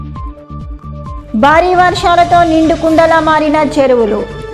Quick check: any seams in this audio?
yes; 1 cut; at 1.1 s

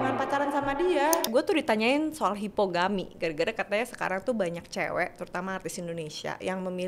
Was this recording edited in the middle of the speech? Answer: yes; 1 cut; at 1.3 s

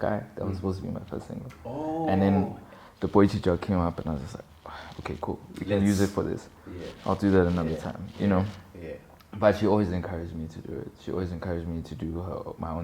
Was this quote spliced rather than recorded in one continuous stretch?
no; 0 cuts

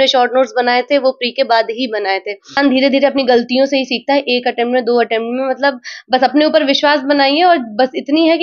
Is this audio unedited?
no; 1 cut; at 2.6 s

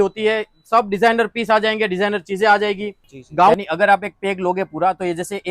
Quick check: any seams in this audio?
yes; 1 cut; at 3.5 s

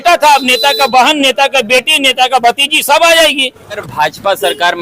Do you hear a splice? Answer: yes; 1 cut; at 3.9 s

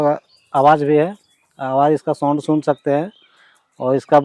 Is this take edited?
no; 0 cuts

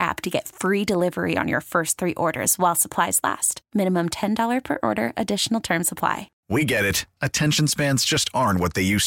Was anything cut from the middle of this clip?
yes; 1 cut; at 6.3 s

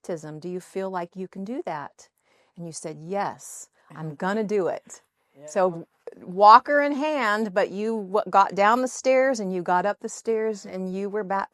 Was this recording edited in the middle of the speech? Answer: no; 0 cuts

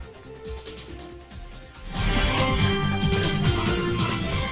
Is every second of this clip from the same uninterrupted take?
no; 2 cuts; at 2.1 s, 3.6 s

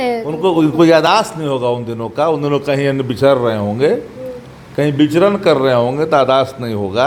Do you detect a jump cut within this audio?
no; 0 cuts

